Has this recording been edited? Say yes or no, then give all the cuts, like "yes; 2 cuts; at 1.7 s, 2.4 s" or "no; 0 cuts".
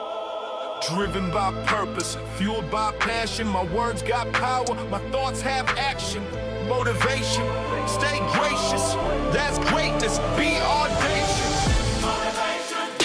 no; 0 cuts